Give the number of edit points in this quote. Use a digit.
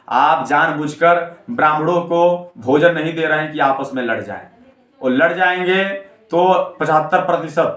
0